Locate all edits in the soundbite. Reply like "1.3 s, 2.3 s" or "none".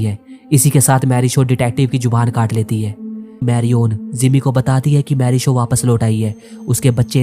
3.4 s